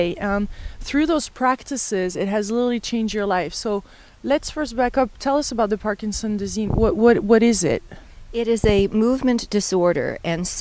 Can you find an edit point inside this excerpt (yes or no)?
no